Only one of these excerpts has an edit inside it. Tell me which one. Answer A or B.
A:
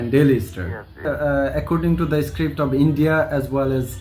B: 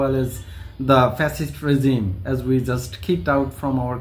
A